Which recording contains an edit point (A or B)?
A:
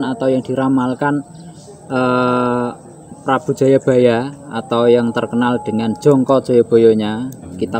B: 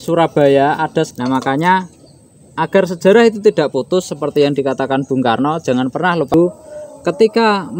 B